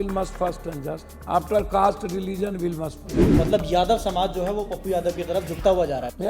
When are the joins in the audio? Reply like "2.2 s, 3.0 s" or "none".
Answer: 1.1 s, 3.2 s